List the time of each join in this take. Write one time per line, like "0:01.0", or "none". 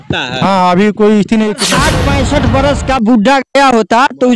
0:01.7